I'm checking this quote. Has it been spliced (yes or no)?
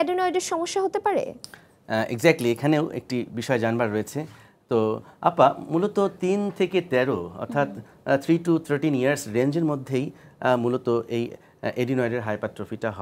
no